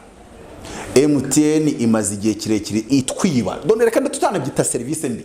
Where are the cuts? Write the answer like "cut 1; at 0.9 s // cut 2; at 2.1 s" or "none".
cut 1; at 2.9 s